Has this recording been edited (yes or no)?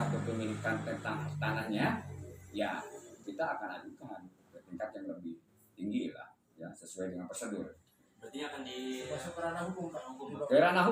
no